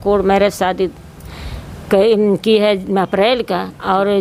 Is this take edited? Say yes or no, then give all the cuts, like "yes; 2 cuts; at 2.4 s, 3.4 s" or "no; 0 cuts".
no; 0 cuts